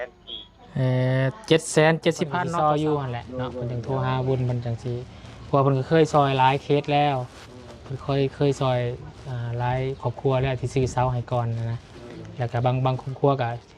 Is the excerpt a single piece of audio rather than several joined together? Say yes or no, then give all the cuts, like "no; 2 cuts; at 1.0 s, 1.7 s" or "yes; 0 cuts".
no; 1 cut; at 2.4 s